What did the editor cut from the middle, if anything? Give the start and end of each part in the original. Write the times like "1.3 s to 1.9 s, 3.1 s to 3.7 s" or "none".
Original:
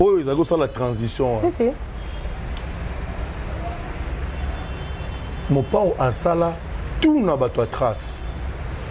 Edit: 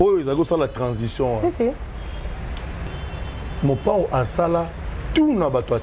2.9 s to 4.7 s